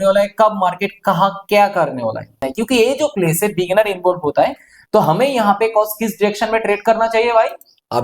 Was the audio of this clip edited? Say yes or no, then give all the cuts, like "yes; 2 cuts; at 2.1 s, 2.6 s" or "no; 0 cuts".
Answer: yes; 1 cut; at 2.5 s